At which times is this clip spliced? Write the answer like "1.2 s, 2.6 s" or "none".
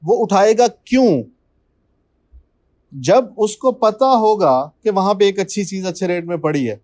none